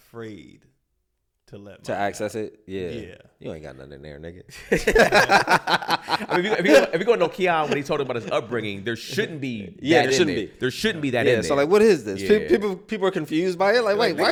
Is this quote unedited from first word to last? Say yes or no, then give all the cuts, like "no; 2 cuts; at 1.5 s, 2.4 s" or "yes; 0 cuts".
yes; 0 cuts